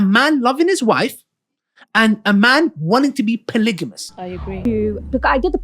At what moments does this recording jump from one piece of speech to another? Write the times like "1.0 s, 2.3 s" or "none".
4.6 s